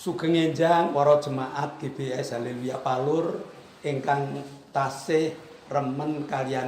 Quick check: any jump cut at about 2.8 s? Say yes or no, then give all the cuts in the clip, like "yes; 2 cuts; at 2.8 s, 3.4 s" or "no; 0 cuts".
no; 1 cut; at 0.9 s